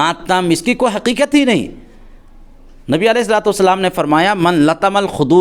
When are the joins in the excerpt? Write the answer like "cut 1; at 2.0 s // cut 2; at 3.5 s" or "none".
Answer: none